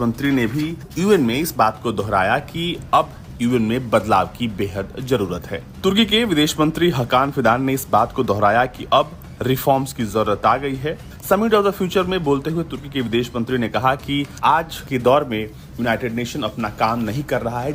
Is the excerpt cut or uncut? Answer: uncut